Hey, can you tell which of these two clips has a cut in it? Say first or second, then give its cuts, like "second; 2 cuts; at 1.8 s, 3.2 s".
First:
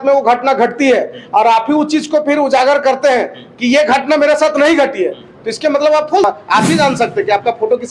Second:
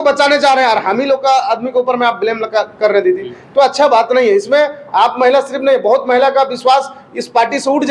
first; 1 cut; at 6.2 s